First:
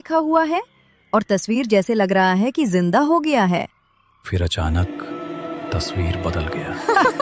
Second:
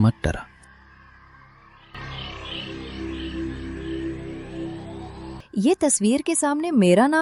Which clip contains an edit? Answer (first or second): second